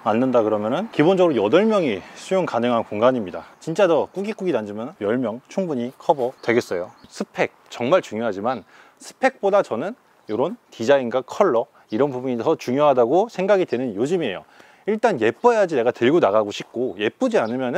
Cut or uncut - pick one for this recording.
cut